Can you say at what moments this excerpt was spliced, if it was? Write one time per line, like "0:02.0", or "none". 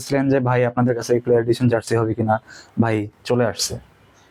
none